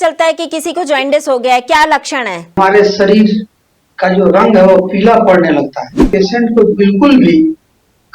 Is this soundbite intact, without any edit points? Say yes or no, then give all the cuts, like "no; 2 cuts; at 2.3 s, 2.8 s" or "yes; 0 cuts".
no; 2 cuts; at 2.6 s, 6.0 s